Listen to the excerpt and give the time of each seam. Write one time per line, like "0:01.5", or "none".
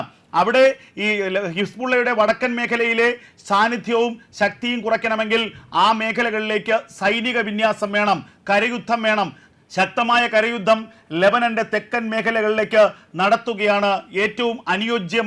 0:09.5